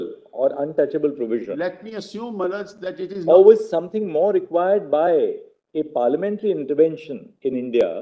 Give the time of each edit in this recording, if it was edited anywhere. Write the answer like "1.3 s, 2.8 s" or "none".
none